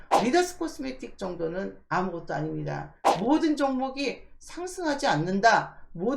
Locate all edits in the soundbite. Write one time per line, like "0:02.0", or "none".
0:02.9